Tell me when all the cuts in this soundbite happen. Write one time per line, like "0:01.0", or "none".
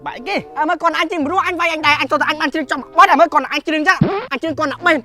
none